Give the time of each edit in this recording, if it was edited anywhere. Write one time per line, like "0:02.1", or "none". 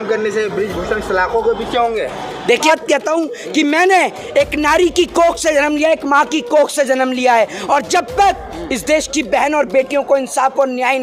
0:02.6